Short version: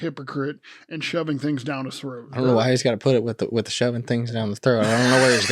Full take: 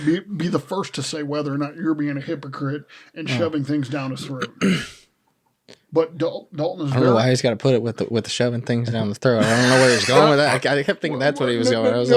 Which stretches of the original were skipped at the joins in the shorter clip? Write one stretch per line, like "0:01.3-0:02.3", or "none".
0:04.5-0:06.9